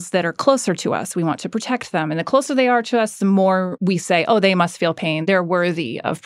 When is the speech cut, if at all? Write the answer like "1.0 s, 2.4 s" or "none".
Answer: 3.7 s, 5.2 s